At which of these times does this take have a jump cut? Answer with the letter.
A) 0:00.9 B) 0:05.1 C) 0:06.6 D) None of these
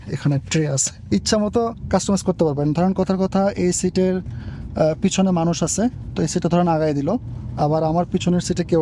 A